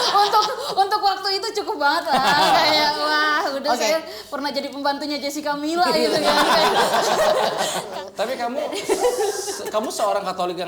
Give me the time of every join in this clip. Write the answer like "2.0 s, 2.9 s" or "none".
7.8 s